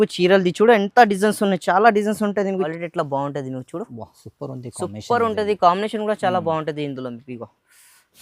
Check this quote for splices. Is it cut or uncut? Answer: cut